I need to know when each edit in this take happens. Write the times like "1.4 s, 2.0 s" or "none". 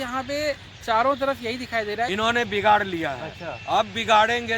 2.1 s